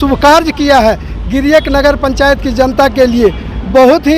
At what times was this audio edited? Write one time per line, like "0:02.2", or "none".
none